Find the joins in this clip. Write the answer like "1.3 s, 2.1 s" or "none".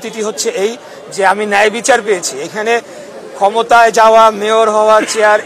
none